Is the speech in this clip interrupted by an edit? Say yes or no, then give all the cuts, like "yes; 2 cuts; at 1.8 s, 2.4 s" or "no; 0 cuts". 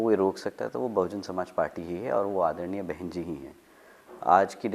no; 0 cuts